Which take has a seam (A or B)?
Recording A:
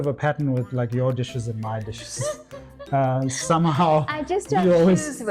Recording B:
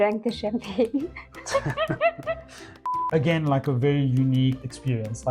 B